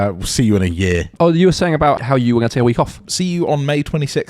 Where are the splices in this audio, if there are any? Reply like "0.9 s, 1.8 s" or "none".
1.1 s, 2.0 s, 3.1 s